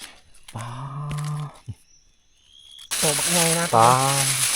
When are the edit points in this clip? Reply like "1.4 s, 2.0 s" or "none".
2.8 s